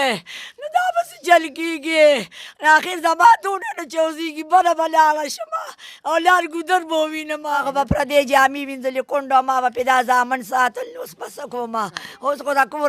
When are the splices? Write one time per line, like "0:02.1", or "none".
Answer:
0:07.6